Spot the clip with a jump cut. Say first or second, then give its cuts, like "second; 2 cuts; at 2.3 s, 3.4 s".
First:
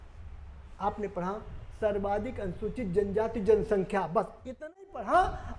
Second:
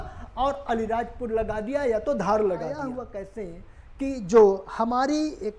second; 1 cut; at 2.9 s